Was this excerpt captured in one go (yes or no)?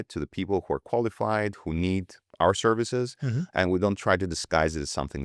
yes